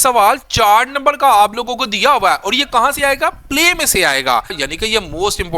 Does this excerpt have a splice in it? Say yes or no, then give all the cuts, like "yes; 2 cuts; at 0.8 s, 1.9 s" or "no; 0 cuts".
yes; 1 cut; at 4.6 s